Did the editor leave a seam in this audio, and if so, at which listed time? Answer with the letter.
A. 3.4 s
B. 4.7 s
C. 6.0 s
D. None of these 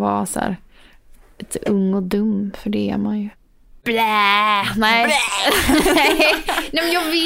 A